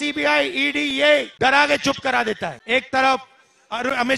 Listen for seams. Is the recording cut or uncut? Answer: cut